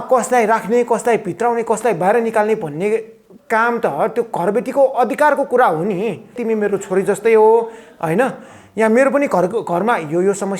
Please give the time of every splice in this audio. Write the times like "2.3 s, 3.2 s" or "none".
6.4 s